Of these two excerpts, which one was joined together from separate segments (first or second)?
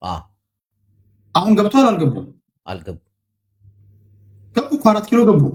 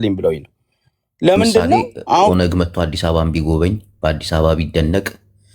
second